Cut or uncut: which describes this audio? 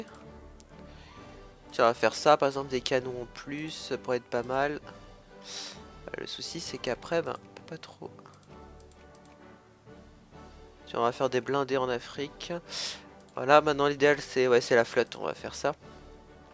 uncut